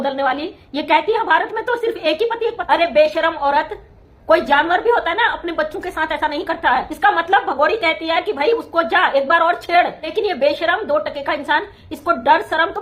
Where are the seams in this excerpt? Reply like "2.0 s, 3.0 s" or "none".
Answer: 2.6 s, 6.9 s, 10.1 s